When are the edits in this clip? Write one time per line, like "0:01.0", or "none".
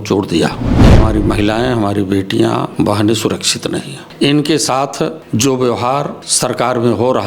0:00.9
0:02.7
0:04.0
0:05.2
0:06.2